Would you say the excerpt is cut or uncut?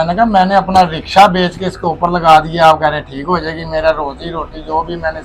uncut